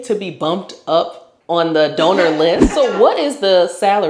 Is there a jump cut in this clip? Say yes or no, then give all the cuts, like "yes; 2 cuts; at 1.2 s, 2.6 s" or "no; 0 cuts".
yes; 1 cut; at 2.7 s